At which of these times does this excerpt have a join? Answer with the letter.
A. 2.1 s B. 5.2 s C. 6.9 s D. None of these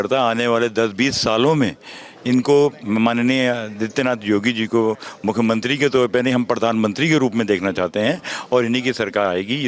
D